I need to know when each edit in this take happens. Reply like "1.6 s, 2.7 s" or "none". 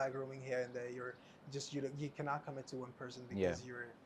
none